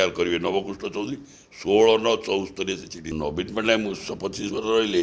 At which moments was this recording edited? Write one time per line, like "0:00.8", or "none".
0:03.1